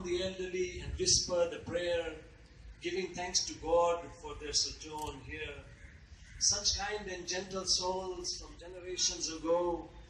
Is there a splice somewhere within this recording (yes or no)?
no